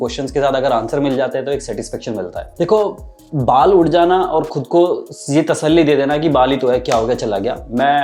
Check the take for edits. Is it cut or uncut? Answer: uncut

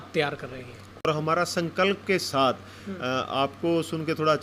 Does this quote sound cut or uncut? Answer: cut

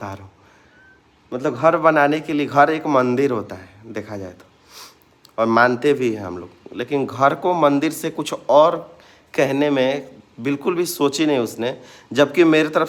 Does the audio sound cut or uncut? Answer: uncut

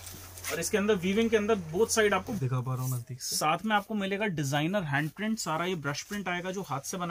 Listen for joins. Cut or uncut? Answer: cut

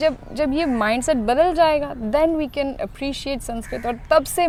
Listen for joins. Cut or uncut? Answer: uncut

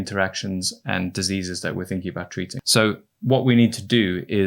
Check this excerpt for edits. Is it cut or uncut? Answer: cut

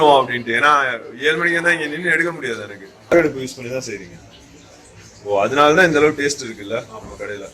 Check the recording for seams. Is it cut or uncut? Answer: cut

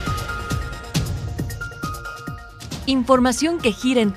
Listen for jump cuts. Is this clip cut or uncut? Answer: uncut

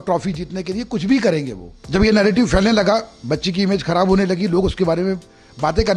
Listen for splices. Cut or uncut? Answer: cut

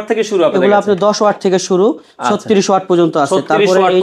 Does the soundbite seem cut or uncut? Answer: uncut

